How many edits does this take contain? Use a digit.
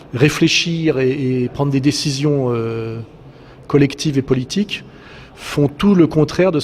1